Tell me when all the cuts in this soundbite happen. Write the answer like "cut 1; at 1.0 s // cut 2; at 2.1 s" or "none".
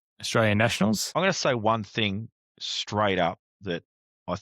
cut 1; at 1.1 s